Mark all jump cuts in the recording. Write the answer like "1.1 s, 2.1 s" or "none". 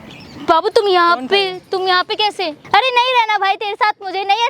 2.6 s